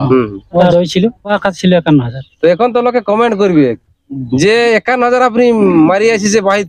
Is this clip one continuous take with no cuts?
no; 2 cuts; at 0.8 s, 2.2 s

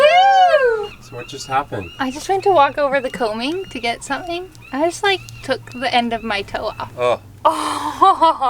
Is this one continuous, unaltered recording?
no; 2 cuts; at 1.0 s, 6.9 s

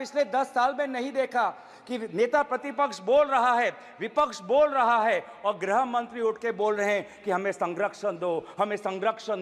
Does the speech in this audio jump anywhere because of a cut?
no; 0 cuts

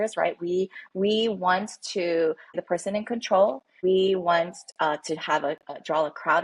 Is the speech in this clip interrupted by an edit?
yes; 2 cuts; at 2.6 s, 3.7 s

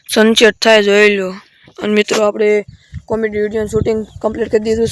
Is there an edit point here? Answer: no; 0 cuts

